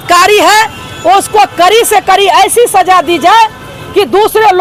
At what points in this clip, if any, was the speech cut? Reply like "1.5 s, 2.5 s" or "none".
none